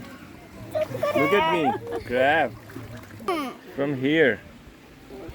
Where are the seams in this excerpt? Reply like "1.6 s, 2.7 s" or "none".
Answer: 3.3 s